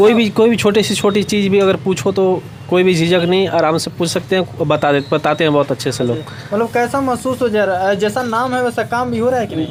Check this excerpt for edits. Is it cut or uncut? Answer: uncut